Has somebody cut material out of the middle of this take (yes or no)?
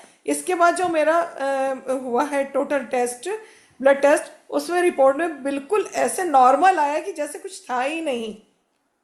no